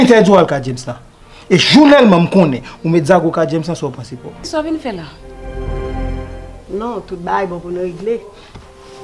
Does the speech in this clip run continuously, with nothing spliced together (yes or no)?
no